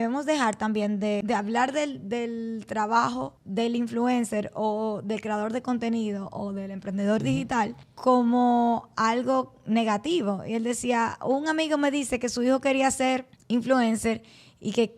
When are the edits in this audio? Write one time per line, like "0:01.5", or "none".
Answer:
0:01.2